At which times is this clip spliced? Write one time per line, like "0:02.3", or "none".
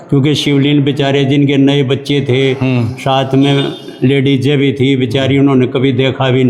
none